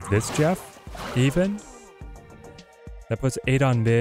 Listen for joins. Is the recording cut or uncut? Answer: uncut